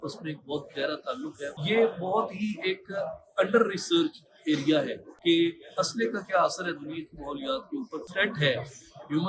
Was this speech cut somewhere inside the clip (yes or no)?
yes